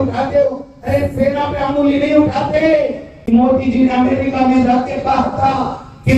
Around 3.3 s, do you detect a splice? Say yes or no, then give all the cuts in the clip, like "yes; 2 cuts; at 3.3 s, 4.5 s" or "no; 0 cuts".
yes; 1 cut; at 3.3 s